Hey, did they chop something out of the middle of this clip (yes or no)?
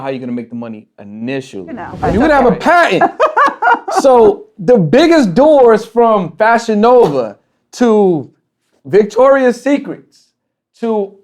yes